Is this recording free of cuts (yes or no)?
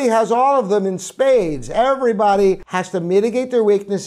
no